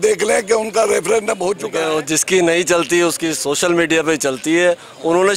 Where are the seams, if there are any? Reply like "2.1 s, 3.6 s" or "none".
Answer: 1.6 s